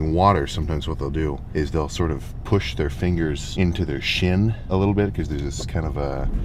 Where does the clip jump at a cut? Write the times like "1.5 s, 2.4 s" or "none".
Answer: none